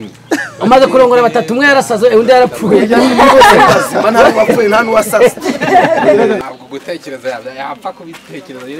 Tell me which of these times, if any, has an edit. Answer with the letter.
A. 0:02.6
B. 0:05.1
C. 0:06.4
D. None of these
C